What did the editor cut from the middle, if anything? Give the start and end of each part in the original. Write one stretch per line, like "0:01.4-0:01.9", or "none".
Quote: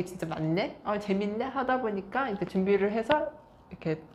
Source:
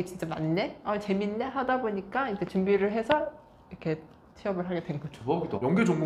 none